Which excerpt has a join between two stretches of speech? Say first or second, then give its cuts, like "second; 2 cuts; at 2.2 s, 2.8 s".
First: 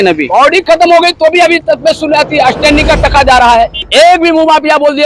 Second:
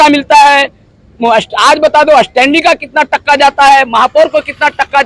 first; 1 cut; at 3.8 s